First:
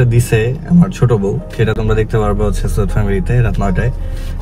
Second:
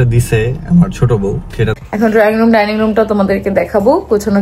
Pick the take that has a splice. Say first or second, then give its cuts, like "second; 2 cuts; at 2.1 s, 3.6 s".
second; 1 cut; at 1.8 s